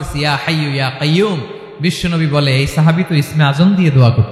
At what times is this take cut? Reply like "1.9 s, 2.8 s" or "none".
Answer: none